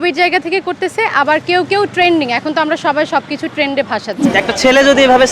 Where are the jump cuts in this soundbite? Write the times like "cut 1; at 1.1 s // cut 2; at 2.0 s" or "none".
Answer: cut 1; at 4.2 s

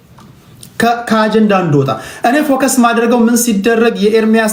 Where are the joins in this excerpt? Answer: none

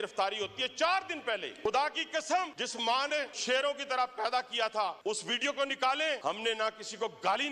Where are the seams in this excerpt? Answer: cut 1; at 1.5 s // cut 2; at 3.1 s // cut 3; at 5.0 s // cut 4; at 6.2 s

